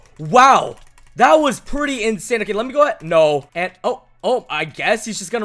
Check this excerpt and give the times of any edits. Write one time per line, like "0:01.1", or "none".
0:03.5